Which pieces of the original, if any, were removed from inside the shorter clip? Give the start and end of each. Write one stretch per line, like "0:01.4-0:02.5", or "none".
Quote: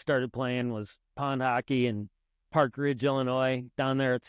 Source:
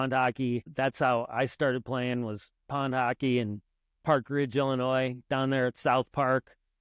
none